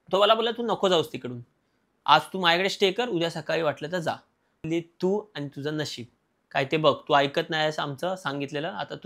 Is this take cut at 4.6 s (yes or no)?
yes